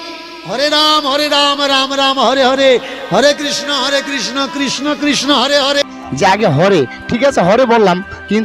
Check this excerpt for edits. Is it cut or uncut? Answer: cut